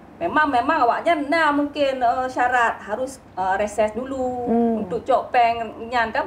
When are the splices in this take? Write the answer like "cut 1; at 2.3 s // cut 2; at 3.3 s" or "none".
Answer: none